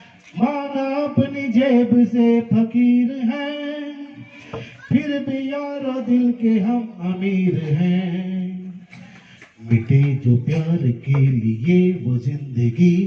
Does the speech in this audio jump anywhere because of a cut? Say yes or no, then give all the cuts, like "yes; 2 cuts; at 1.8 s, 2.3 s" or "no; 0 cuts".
no; 0 cuts